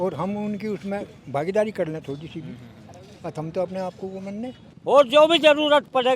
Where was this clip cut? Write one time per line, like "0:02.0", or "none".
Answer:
0:04.7